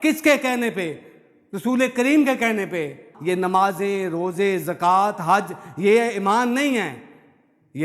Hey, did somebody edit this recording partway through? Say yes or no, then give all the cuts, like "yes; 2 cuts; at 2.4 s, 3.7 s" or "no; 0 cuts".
yes; 1 cut; at 3.1 s